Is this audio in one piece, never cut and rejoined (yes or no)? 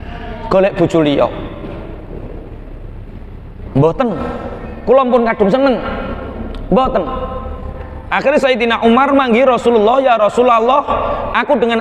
yes